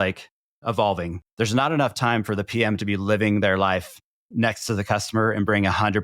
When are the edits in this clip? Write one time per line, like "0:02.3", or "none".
0:01.1